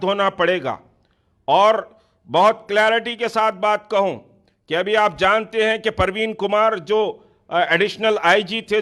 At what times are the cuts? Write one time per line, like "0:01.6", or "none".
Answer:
none